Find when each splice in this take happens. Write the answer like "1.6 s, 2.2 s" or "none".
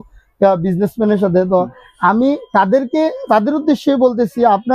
none